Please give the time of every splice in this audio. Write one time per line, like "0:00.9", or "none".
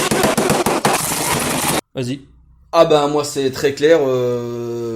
0:01.9